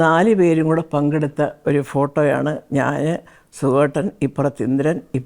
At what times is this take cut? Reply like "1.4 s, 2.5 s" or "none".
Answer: none